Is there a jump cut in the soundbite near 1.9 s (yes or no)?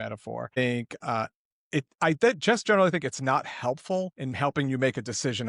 no